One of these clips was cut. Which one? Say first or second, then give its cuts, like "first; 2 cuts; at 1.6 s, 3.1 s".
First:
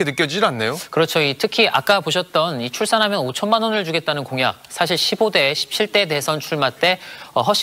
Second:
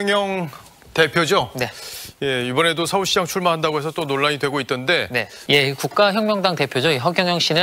second; 1 cut; at 5.3 s